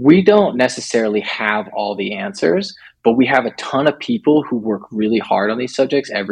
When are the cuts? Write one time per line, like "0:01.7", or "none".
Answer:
none